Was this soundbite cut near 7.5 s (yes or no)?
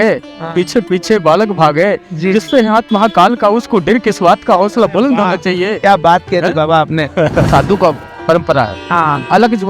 yes